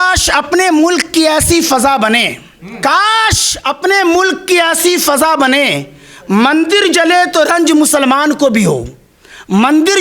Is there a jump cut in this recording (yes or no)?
no